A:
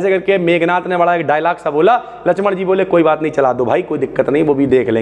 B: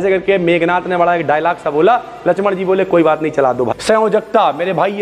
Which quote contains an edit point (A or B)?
B